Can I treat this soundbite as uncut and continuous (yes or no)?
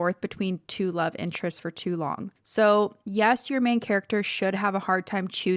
no